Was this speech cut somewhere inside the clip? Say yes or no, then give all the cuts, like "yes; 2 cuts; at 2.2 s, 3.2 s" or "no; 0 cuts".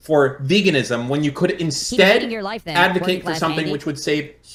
no; 0 cuts